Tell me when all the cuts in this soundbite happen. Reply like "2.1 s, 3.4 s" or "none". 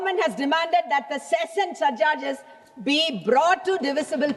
none